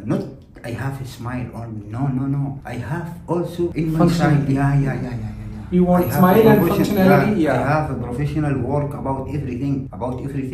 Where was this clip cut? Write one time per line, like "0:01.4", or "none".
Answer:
none